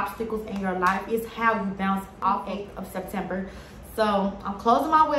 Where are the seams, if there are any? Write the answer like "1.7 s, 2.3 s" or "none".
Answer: 2.3 s

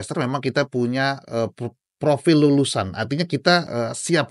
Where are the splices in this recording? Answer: none

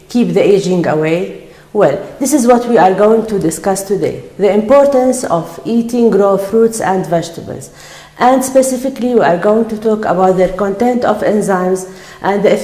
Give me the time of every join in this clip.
1.7 s

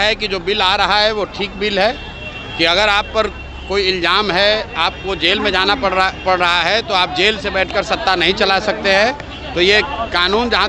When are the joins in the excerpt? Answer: none

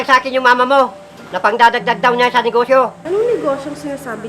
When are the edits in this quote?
3.0 s

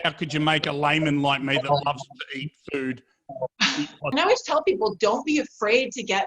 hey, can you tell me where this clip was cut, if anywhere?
4.0 s

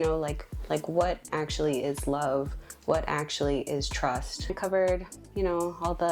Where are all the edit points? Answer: 4.6 s

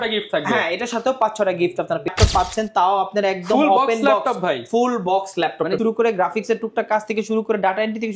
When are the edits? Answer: 2.1 s, 5.8 s

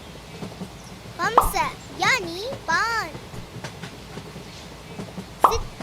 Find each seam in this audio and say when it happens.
1.2 s, 3.1 s, 4.8 s

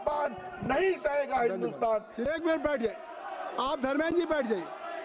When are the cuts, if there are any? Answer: 2.3 s

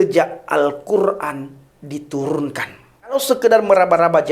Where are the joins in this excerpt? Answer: 3.1 s

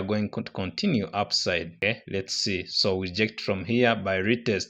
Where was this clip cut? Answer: none

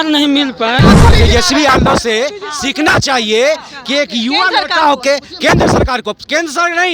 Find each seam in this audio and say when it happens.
1.1 s

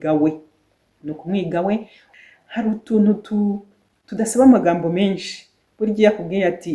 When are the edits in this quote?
2.0 s

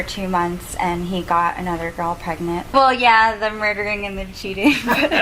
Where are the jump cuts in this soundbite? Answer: 2.7 s

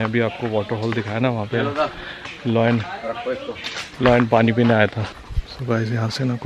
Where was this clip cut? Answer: 5.0 s

